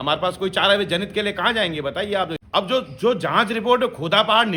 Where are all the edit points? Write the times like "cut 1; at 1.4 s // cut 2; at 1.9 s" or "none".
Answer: cut 1; at 2.4 s